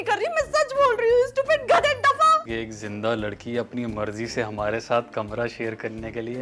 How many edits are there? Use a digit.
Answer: 1